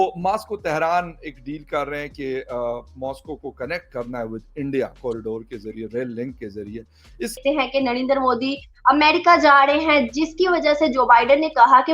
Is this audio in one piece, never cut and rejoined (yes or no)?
no